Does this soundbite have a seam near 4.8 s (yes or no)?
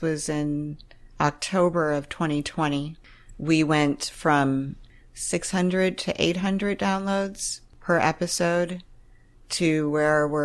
yes